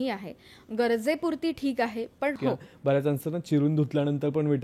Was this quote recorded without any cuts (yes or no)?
no